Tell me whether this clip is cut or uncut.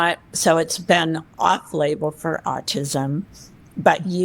cut